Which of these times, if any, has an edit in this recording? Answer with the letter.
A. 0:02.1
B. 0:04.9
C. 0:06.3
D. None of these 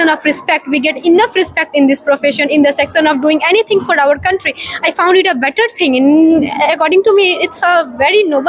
D